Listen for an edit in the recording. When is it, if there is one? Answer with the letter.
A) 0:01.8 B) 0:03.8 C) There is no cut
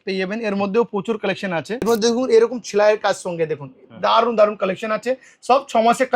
A